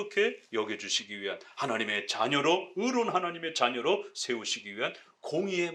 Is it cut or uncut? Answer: uncut